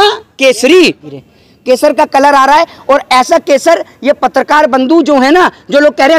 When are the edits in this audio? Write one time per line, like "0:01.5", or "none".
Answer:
0:01.1